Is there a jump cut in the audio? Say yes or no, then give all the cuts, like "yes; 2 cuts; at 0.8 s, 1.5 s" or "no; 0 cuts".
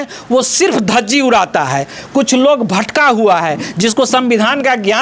no; 0 cuts